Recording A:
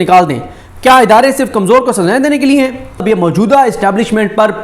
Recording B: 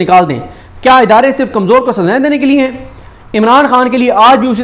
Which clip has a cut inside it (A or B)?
A